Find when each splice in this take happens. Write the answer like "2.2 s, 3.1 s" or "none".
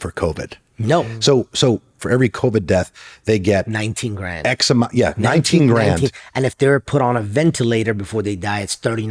2.0 s

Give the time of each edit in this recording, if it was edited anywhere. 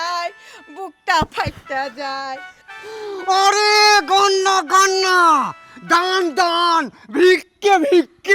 2.5 s

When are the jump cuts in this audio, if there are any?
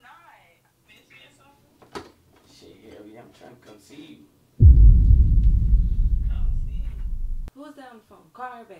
0.9 s, 7.4 s

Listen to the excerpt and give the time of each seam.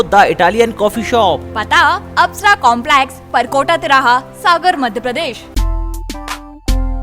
5.4 s

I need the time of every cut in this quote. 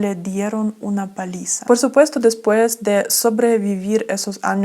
1.6 s

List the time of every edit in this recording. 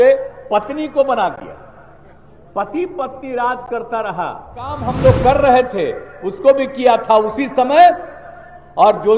4.9 s

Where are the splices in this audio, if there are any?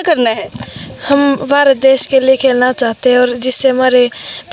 none

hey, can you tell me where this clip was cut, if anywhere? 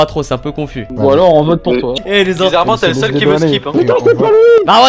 1.9 s, 3.7 s

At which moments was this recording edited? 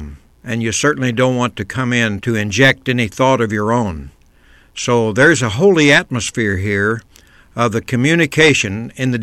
2.2 s

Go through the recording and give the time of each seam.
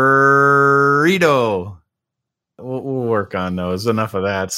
2.4 s

